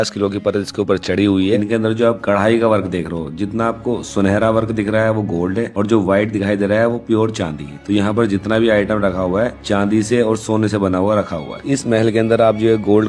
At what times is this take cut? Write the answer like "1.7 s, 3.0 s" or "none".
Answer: 1.6 s, 11.6 s